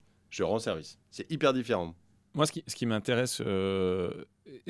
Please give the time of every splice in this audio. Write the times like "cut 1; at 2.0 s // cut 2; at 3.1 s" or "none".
none